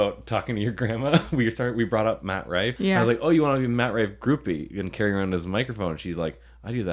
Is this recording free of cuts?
no; 1 cut; at 2.7 s

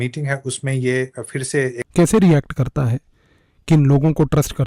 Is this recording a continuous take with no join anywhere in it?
no; 1 cut; at 1.8 s

